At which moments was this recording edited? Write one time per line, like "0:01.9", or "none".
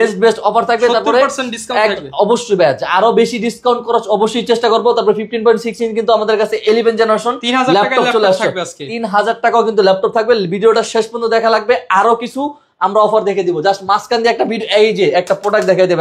none